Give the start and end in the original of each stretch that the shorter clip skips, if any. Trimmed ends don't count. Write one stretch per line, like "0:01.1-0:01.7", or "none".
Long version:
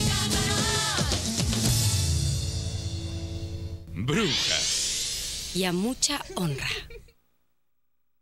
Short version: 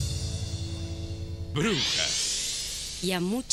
0:03.9-0:04.1